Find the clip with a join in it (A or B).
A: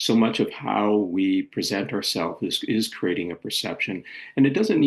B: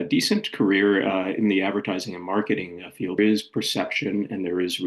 B